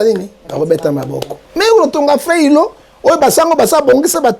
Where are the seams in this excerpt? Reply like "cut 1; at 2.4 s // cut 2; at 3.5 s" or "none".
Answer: cut 1; at 1.4 s